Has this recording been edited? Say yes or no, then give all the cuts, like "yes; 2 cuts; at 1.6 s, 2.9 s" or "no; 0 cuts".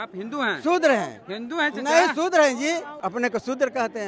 yes; 1 cut; at 2.9 s